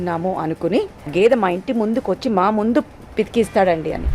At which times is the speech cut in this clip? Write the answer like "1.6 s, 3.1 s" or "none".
1.1 s